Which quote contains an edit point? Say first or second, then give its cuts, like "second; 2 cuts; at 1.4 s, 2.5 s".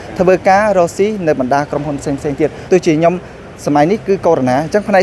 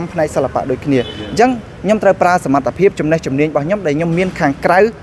first; 1 cut; at 2.6 s